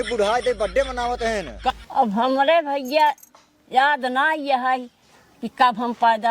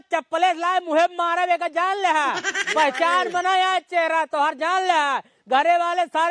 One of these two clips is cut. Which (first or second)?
first